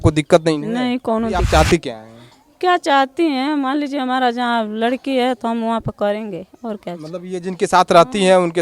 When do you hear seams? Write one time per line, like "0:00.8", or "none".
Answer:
0:01.4